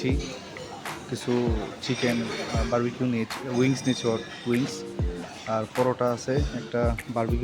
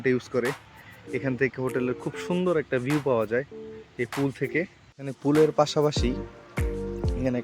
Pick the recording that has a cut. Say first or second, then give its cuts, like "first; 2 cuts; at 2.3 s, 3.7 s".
second; 1 cut; at 4.9 s